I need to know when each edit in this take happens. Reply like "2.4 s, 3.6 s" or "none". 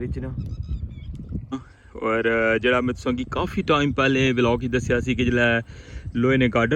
1.5 s